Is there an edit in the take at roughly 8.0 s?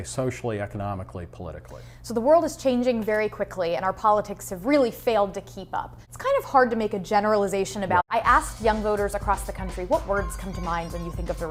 no; 0 cuts

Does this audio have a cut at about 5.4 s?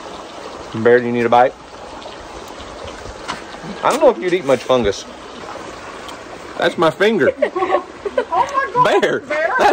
yes; 1 cut; at 5.4 s

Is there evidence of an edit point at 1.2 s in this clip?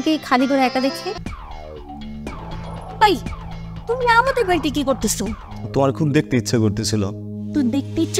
yes; 1 cut; at 1.2 s

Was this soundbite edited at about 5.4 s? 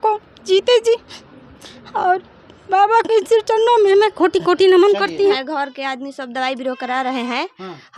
yes; 1 cut; at 5.4 s

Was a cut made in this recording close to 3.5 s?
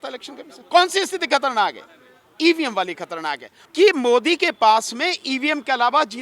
yes; 1 cut; at 3.5 s

